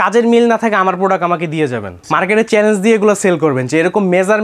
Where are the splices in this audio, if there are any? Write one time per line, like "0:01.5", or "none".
0:01.9